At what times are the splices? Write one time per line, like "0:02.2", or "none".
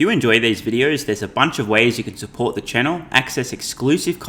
none